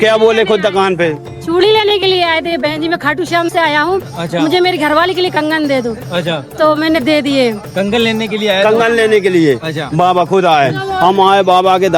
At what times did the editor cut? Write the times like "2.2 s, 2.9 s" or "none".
10.9 s